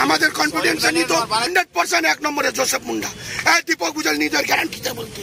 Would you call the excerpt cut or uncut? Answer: cut